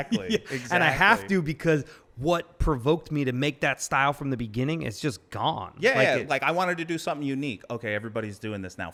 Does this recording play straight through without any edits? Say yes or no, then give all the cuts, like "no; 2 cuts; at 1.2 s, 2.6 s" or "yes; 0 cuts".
yes; 0 cuts